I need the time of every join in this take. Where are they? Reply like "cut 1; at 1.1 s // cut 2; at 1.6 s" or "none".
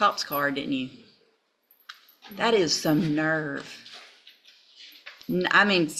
none